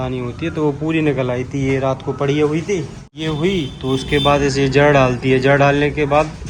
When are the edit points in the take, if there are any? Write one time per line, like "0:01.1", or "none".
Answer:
0:03.0